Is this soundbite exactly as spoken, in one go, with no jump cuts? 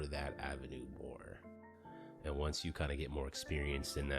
no; 1 cut; at 1.5 s

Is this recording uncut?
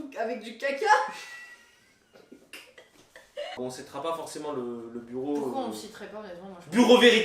no; 1 cut; at 3.6 s

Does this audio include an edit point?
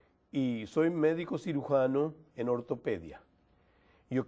yes; 1 cut; at 2.6 s

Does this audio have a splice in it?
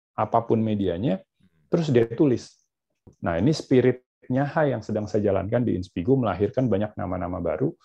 yes; 1 cut; at 3.1 s

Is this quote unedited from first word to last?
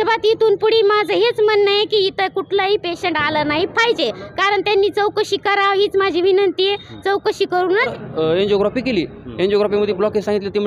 no; 1 cut; at 7.9 s

